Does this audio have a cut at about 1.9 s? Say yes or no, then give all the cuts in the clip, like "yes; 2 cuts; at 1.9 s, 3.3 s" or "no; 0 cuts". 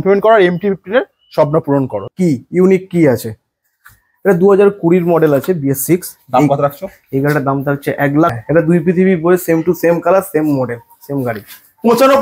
yes; 2 cuts; at 1.9 s, 8.4 s